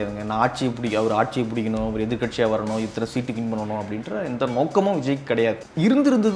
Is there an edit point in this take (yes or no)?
no